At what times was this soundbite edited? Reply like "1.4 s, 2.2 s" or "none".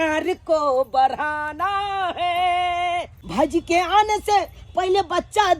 3.2 s